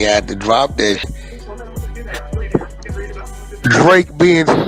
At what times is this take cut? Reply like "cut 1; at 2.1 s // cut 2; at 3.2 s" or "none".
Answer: cut 1; at 1.1 s